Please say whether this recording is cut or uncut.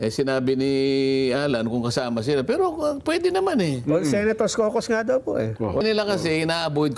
cut